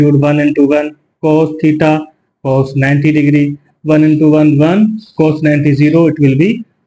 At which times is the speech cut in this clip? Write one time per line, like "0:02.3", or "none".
none